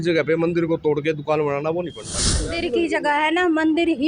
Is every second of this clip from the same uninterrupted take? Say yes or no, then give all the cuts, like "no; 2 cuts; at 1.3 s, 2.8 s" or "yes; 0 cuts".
no; 1 cut; at 2.5 s